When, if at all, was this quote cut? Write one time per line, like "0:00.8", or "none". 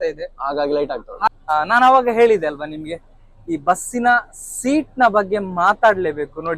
0:01.3